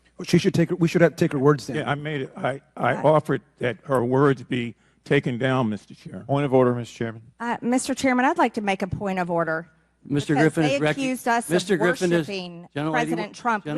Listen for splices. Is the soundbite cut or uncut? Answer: uncut